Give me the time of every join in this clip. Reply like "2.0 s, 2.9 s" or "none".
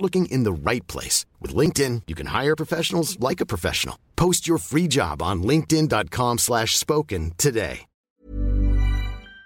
8.2 s